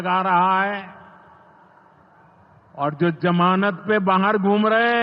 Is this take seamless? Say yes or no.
yes